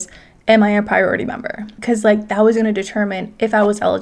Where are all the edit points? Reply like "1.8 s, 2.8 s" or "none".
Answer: 1.8 s